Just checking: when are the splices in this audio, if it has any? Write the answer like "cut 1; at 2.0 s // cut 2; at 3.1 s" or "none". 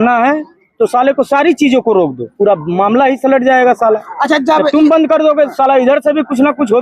cut 1; at 2.2 s